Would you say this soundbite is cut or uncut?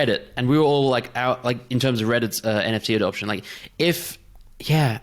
uncut